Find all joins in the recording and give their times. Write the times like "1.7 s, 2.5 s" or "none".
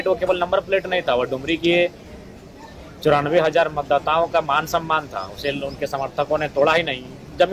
none